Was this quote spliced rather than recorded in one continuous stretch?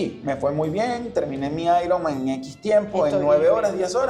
no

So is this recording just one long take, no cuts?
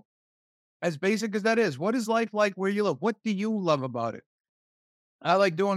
yes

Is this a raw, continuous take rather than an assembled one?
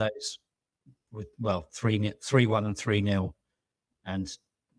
yes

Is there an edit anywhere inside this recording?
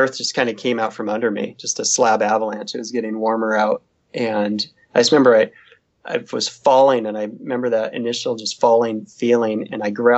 no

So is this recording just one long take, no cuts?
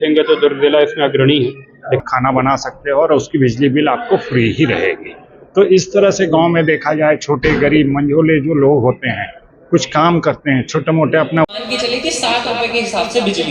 no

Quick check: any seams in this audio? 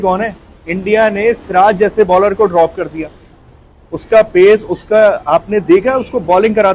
no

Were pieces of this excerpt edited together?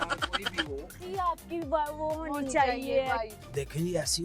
yes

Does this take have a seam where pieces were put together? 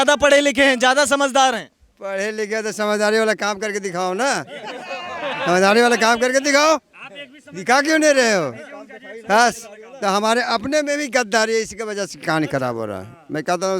no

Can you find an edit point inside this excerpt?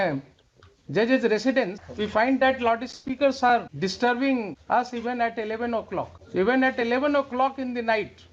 yes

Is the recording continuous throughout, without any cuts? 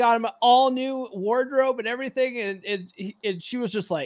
yes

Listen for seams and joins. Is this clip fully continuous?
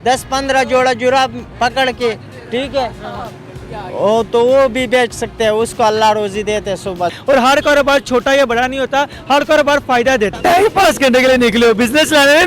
no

